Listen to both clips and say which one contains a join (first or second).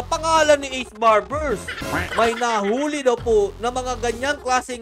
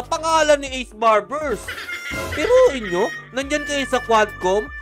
first